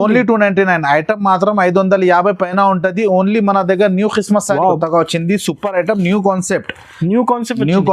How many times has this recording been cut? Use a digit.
1